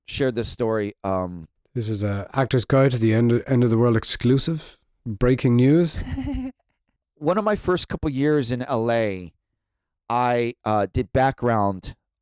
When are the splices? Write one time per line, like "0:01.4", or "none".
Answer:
0:07.1

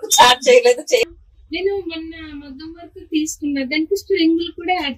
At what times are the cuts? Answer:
0:01.0

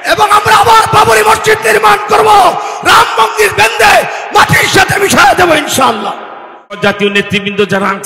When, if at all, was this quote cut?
0:06.8

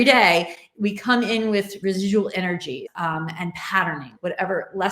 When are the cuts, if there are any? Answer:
0:01.7
0:02.9
0:04.1

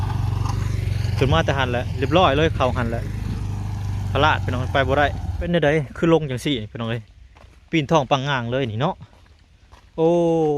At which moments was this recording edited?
0:05.5

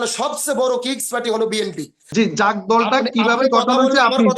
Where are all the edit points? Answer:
0:02.0

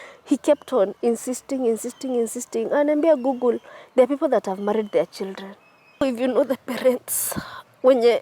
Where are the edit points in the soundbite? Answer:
0:06.0

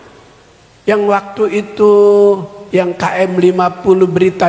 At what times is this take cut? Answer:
0:02.5

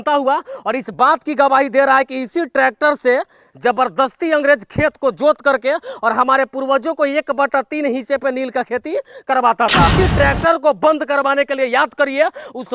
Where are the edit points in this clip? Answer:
0:09.9

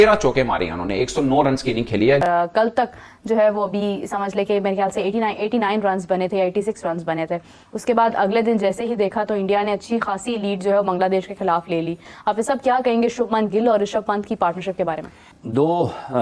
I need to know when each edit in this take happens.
0:02.2

